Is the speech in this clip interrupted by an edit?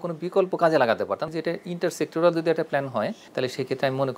yes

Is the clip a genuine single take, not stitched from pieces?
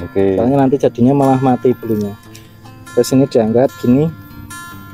yes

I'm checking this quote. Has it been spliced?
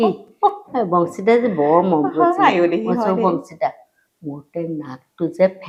no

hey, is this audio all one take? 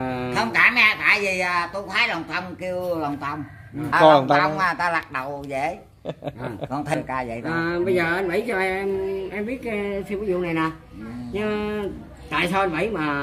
no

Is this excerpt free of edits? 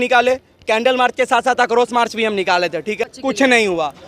no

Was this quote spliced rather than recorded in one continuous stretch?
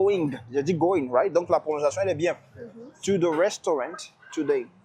no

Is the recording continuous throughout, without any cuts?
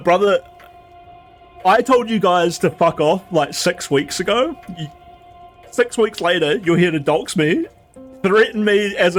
yes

